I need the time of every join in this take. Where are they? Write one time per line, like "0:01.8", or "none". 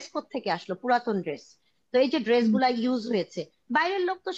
none